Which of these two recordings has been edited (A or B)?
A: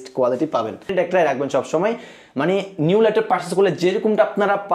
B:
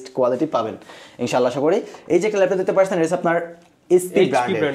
A